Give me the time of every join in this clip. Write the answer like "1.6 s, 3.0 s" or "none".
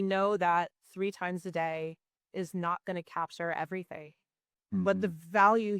none